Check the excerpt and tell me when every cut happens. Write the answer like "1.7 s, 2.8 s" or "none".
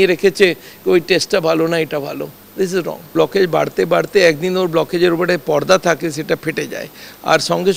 3.1 s